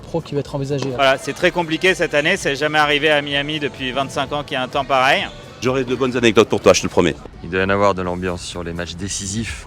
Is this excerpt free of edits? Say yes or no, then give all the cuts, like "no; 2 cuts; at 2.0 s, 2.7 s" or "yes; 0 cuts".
no; 3 cuts; at 0.9 s, 5.5 s, 7.2 s